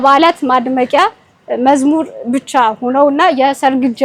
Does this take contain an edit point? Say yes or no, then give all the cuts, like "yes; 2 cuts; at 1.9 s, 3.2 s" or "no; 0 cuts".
no; 0 cuts